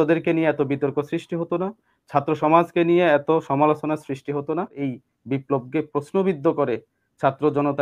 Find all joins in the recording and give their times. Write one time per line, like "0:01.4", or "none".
0:04.8